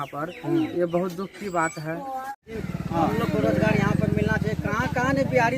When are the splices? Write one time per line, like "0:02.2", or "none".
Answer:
0:02.5